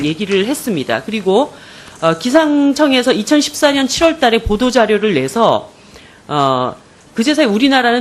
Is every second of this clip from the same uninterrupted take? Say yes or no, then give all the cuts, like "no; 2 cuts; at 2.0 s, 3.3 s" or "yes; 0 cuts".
no; 1 cut; at 2.2 s